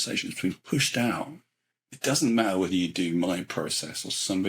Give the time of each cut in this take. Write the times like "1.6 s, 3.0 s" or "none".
1.8 s

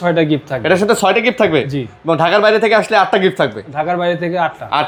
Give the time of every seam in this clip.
none

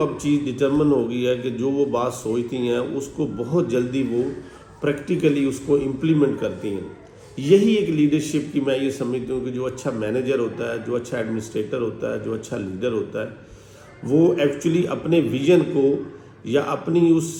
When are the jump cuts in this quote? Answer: none

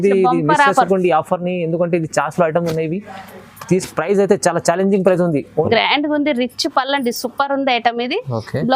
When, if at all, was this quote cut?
5.7 s

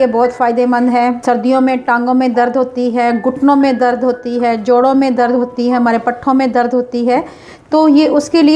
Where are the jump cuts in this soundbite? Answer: 1.2 s

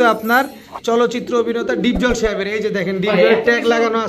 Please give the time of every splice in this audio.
none

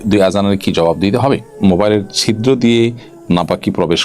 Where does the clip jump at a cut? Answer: 1.5 s

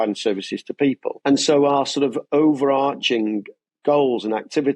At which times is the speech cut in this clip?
1.1 s

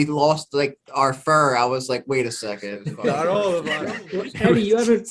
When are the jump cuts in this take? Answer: 3.7 s

